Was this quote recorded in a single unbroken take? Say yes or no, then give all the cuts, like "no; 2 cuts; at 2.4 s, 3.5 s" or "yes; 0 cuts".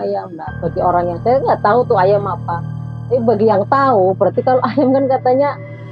yes; 0 cuts